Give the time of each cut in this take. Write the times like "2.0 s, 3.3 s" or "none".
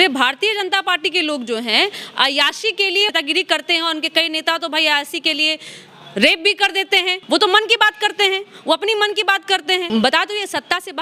3.1 s, 7.2 s, 9.9 s

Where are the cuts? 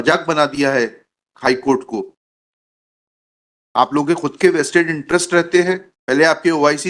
5.9 s

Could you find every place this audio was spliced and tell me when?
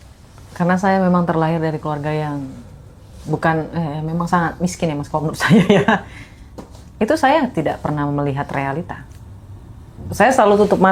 none

